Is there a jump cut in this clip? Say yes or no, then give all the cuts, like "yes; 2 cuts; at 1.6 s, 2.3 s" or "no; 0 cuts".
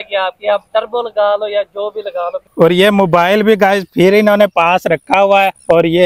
yes; 1 cut; at 2.4 s